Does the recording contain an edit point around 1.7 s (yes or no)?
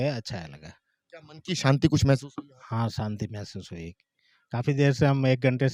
no